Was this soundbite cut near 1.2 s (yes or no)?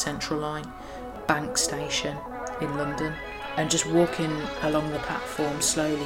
yes